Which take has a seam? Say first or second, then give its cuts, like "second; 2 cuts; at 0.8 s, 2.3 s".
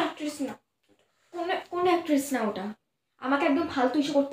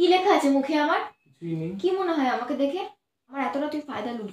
second; 1 cut; at 3.3 s